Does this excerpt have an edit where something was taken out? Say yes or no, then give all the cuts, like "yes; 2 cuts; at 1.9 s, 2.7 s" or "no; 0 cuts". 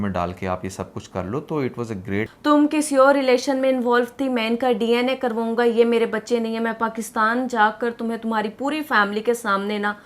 yes; 1 cut; at 2.3 s